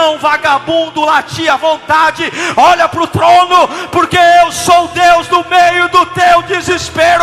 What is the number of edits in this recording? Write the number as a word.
zero